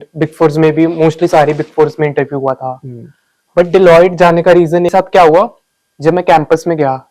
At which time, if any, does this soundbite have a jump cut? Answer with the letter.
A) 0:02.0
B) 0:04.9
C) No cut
B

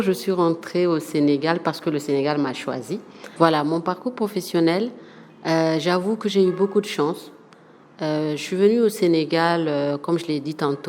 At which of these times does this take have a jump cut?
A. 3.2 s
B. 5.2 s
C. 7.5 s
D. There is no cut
A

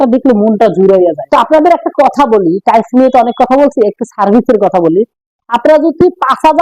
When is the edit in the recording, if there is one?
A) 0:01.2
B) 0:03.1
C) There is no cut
A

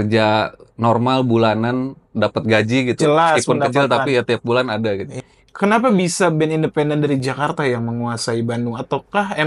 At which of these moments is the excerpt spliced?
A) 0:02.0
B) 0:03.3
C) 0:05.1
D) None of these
C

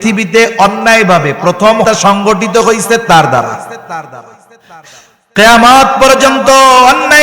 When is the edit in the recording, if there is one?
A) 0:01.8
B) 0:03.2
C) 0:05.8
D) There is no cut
A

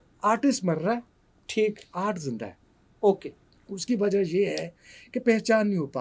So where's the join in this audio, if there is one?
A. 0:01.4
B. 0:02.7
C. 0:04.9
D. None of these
D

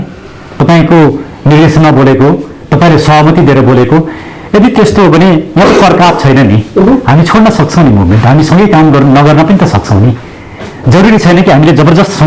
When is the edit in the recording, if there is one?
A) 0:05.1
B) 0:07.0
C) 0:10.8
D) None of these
D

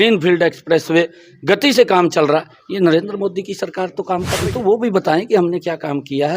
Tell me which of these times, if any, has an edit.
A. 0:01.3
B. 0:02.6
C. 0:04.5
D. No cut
C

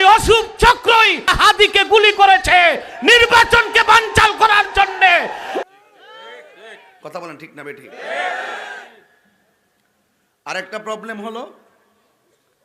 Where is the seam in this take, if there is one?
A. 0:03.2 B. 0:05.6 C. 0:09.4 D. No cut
B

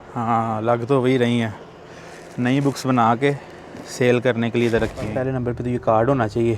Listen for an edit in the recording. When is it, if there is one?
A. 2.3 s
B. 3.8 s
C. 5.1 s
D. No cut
C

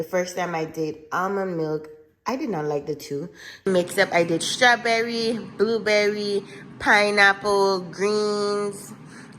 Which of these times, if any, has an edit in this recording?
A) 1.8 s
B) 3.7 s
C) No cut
B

